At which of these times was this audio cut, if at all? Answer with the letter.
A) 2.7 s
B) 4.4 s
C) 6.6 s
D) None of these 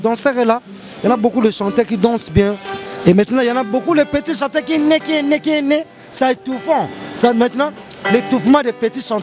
A